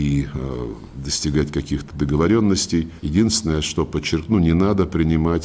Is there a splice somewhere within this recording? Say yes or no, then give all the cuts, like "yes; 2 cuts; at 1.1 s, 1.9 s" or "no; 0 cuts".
yes; 1 cut; at 3.0 s